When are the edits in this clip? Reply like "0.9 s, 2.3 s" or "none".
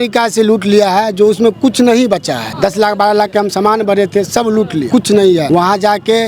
2.4 s, 4.8 s, 5.4 s